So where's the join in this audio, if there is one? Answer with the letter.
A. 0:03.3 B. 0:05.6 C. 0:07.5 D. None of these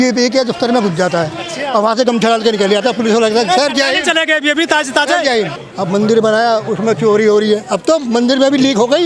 B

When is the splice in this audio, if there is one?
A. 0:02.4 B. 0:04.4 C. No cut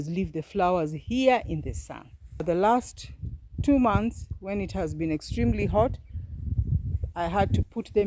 A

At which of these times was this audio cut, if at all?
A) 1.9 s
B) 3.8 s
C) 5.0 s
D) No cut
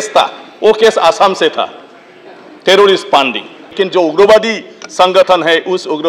B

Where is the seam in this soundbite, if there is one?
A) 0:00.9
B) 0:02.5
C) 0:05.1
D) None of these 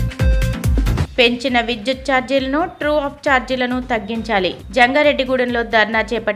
A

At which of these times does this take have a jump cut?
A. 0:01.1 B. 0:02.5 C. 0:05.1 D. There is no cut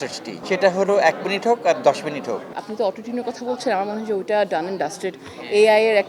B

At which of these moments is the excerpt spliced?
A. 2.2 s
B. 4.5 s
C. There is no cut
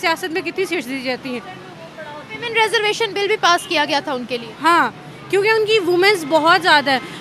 C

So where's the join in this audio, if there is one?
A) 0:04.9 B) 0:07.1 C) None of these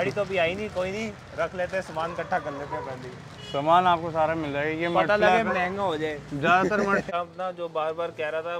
B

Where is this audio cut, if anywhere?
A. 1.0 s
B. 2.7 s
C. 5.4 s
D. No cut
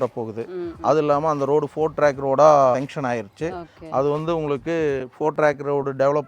B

